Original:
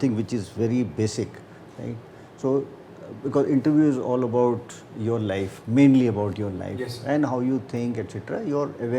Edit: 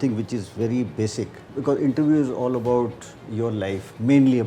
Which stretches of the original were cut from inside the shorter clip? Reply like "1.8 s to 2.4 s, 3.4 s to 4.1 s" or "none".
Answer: 1.4 s to 3.1 s